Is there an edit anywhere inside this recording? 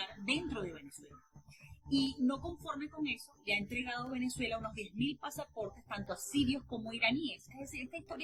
no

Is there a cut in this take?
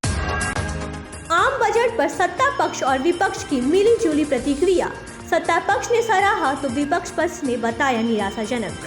yes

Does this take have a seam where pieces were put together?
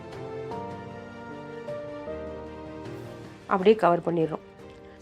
yes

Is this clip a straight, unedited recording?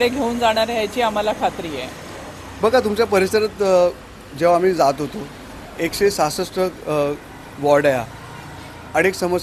yes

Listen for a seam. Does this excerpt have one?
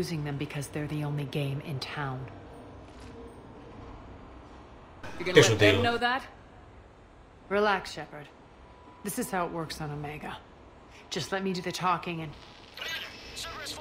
yes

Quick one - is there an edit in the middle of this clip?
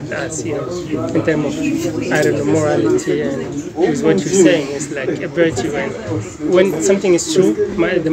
no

